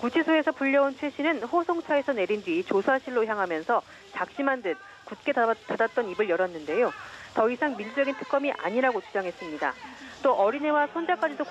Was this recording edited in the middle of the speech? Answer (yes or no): yes